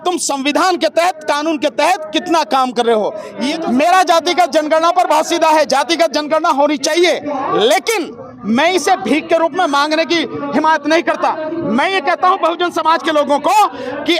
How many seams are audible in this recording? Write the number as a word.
one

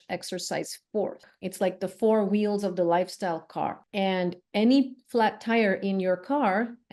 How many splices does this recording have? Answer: two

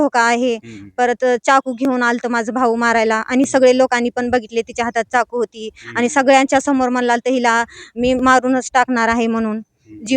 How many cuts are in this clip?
zero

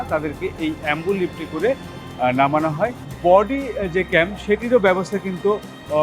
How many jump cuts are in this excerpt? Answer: one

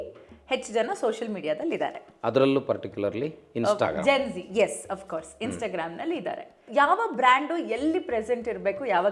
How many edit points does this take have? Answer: one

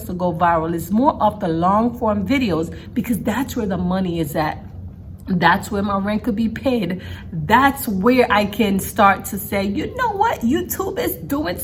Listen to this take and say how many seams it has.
zero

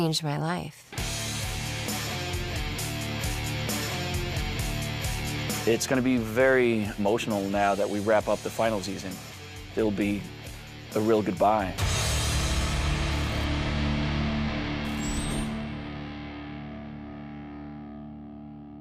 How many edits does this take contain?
one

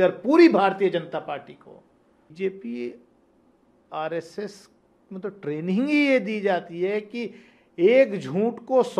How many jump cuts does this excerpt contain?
one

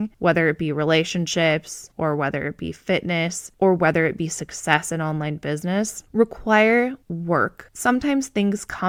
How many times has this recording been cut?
zero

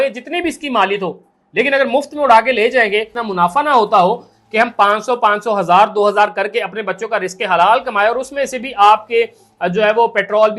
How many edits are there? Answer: one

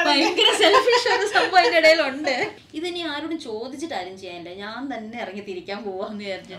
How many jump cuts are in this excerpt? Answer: one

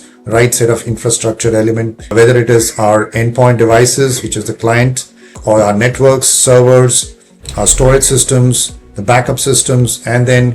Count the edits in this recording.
three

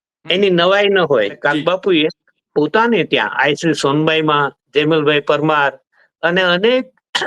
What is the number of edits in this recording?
one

